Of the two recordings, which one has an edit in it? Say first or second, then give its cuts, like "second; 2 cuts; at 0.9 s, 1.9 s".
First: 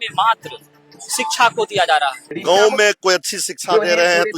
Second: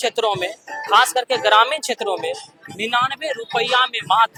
first; 1 cut; at 2.3 s